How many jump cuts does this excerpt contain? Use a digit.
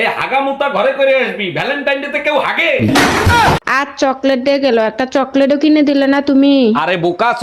1